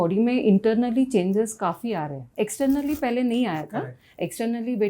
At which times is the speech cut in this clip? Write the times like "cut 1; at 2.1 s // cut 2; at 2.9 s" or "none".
cut 1; at 2.2 s